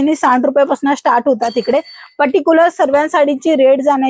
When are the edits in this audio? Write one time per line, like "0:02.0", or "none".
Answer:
none